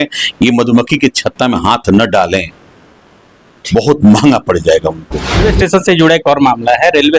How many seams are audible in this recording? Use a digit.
1